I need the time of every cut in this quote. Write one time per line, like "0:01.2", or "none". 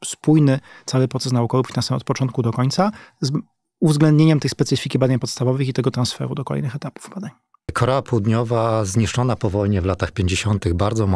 0:07.7